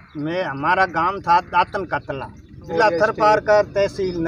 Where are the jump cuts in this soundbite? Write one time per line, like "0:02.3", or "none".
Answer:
0:02.7